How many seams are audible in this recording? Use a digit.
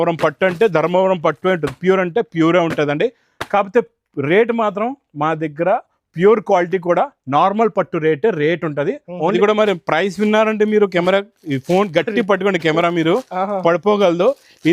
1